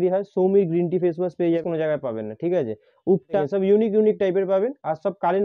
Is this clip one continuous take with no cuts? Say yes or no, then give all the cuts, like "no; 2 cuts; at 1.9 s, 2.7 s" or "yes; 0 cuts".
no; 2 cuts; at 1.6 s, 3.4 s